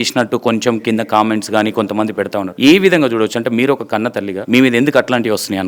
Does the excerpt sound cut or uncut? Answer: cut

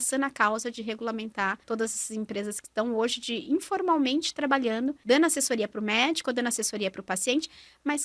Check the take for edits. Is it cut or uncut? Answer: cut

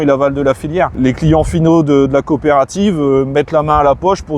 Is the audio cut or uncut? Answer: cut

